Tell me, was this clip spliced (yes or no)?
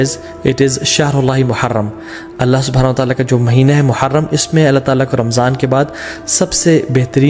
no